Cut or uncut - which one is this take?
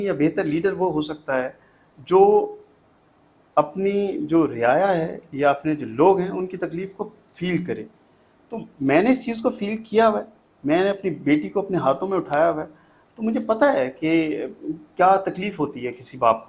uncut